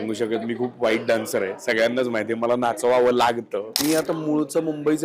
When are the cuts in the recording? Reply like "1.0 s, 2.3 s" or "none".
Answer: 3.8 s